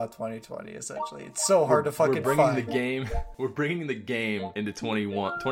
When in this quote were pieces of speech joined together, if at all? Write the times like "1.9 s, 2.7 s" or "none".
3.2 s, 4.5 s